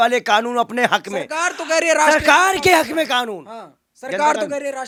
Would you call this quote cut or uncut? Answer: uncut